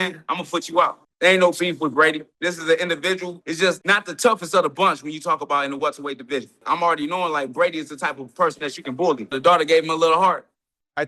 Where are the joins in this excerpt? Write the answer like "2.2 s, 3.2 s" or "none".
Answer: 1.0 s, 2.3 s, 3.4 s, 6.6 s, 9.3 s